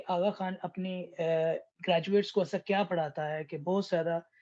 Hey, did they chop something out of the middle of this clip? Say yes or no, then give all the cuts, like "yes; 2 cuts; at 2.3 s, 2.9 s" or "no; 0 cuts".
no; 0 cuts